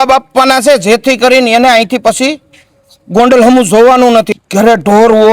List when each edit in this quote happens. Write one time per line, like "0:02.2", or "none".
0:04.3